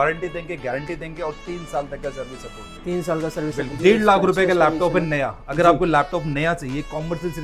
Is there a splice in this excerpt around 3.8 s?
yes; 1 cut; at 3.8 s

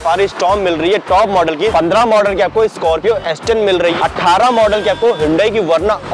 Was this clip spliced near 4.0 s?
yes; 2 cuts; at 1.7 s, 4.0 s

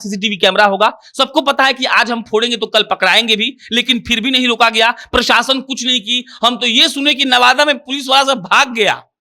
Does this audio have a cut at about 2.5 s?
no; 0 cuts

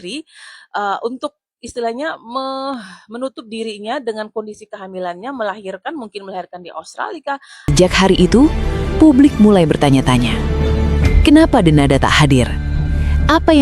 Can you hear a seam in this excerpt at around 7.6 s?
yes; 1 cut; at 7.6 s

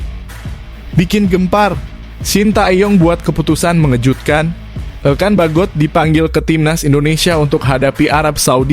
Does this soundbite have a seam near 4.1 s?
no; 1 cut; at 1.0 s

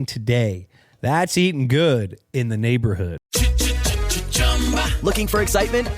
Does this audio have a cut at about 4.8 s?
no; 1 cut; at 3.2 s

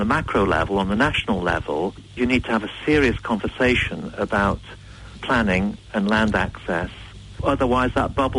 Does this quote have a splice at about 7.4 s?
yes; 2 cuts; at 2.2 s, 7.4 s

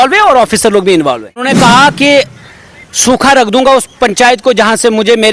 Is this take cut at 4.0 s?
no; 1 cut; at 1.5 s

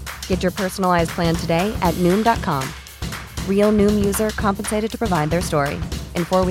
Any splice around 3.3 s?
no; 0 cuts

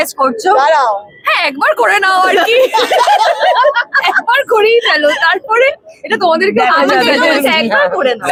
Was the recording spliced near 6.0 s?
no; 0 cuts

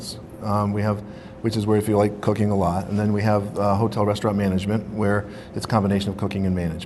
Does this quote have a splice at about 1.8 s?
yes; 1 cut; at 1.8 s

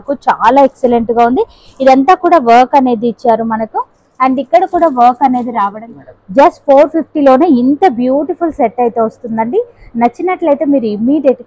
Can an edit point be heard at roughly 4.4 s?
no; 1 cut; at 5.8 s

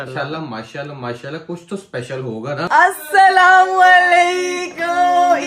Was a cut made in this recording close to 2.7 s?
yes; 1 cut; at 2.7 s

